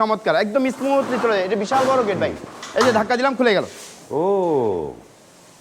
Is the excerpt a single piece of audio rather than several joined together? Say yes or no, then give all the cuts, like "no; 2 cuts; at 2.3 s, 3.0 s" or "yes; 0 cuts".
yes; 0 cuts